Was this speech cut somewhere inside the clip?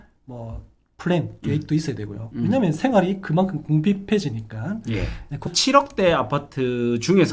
yes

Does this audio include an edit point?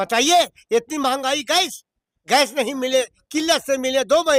no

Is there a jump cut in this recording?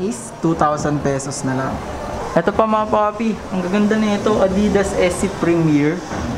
no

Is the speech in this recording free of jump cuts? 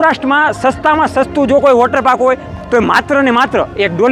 yes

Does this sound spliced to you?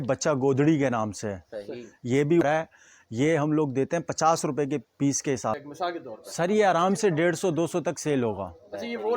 yes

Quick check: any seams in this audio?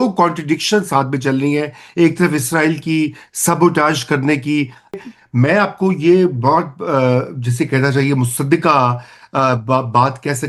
yes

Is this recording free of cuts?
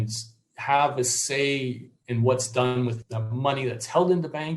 no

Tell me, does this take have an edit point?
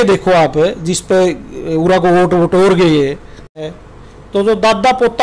yes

